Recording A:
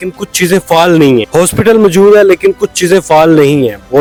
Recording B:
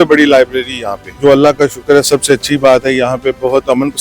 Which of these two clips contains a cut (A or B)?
B